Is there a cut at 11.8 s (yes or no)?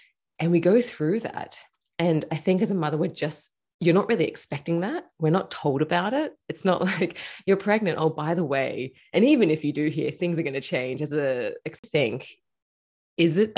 yes